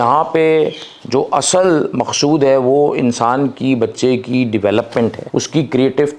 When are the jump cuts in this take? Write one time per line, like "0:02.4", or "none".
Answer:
0:05.2